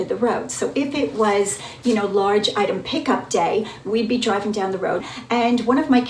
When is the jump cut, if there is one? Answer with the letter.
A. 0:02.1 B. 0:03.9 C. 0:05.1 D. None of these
C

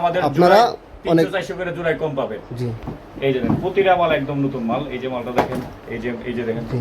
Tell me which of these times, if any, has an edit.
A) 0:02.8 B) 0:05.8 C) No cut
A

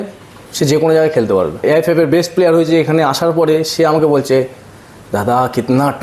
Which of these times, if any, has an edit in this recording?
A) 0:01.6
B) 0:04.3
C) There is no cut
A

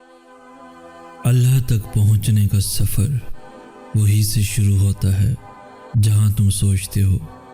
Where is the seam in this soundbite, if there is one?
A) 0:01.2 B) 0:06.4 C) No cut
A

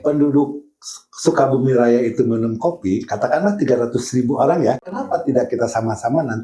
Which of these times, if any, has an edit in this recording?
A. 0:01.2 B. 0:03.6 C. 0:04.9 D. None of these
C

